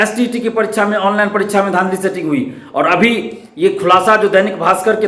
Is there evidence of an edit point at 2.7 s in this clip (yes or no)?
no